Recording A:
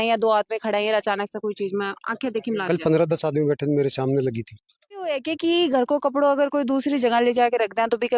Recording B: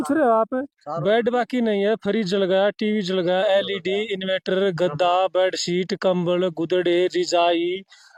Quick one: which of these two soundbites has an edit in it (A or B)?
A